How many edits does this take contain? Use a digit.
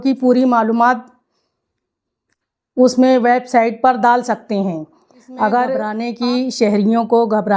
1